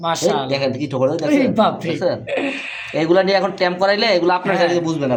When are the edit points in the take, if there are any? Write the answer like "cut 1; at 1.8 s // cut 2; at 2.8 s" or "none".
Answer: none